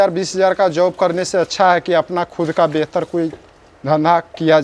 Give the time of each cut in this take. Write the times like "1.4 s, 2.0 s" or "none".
none